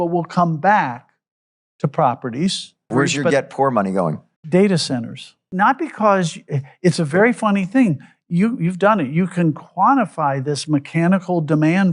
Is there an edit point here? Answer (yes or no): yes